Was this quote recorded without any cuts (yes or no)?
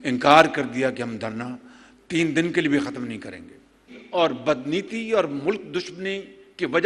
no